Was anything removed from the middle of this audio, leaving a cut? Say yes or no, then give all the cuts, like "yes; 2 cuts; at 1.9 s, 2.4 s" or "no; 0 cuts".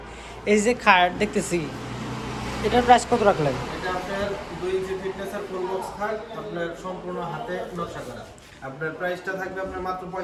no; 0 cuts